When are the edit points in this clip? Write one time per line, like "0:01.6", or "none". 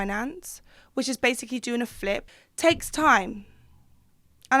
0:02.3